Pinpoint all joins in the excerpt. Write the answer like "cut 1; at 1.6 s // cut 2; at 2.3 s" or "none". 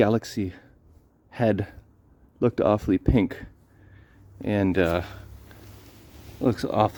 none